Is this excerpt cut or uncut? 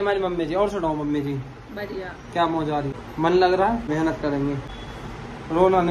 cut